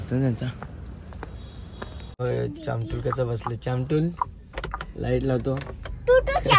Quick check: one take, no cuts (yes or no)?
no